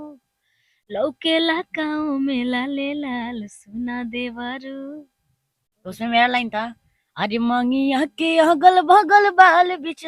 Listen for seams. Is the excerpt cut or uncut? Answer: uncut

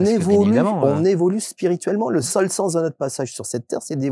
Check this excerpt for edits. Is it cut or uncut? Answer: uncut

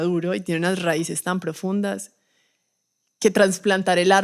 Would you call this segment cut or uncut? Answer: uncut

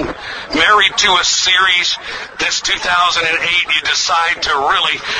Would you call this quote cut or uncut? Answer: uncut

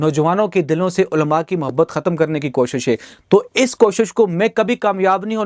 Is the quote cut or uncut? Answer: uncut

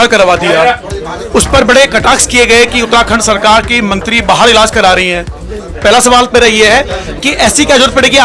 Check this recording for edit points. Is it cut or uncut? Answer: uncut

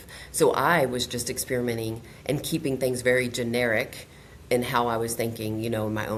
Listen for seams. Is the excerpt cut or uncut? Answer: uncut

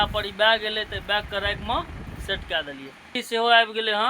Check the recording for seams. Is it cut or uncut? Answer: cut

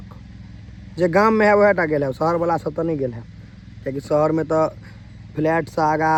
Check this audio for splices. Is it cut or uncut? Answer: uncut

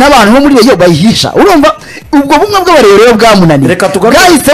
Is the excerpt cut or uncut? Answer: uncut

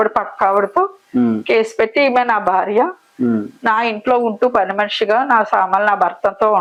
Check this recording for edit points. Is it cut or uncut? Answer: uncut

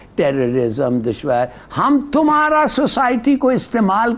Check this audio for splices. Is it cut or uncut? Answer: uncut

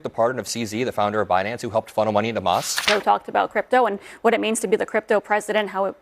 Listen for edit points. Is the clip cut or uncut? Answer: cut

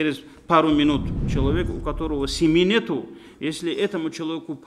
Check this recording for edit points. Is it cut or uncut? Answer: cut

